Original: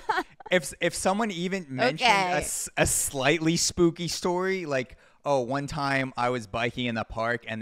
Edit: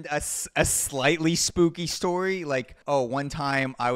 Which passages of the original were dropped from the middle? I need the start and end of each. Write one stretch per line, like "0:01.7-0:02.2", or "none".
0:05.0-0:05.1